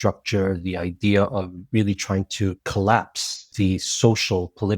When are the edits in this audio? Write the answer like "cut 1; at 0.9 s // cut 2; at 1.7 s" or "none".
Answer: cut 1; at 2.6 s // cut 2; at 3.5 s